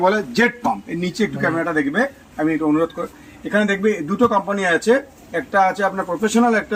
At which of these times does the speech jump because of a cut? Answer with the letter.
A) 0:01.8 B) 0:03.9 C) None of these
C